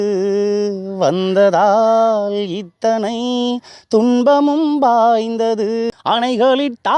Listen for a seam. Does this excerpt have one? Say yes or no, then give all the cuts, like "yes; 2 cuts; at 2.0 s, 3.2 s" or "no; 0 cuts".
yes; 1 cut; at 5.9 s